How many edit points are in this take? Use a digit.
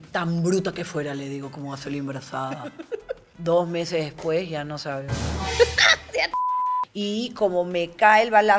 2